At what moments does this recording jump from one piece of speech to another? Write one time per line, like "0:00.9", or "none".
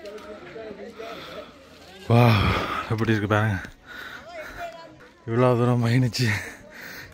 0:05.0